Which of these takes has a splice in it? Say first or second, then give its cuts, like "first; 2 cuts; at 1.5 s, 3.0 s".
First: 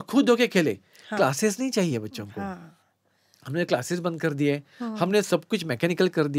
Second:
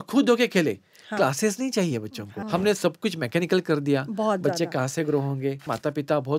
second; 2 cuts; at 2.4 s, 5.7 s